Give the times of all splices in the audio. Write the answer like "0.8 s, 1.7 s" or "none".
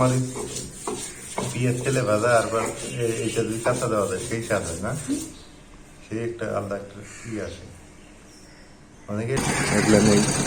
9.4 s